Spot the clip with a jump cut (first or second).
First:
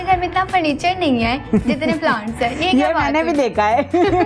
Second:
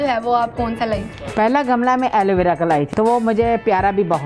second